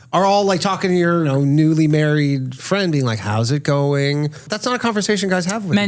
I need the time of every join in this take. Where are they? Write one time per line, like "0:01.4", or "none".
0:01.3
0:04.5

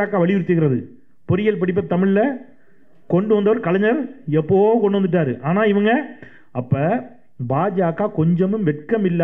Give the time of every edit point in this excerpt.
none

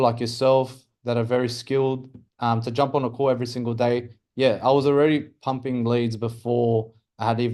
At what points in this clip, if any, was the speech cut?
none

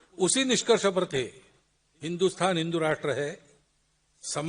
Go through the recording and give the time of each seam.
none

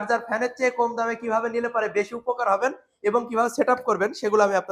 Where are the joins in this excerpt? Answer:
none

